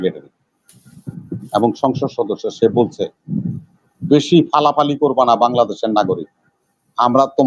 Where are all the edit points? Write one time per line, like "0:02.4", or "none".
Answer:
none